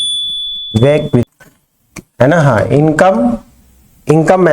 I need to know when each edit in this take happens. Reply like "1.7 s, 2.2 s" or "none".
1.2 s